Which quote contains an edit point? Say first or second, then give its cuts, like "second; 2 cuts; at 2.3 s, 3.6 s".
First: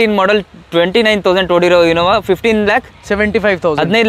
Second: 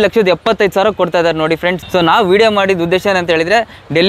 second; 1 cut; at 1.8 s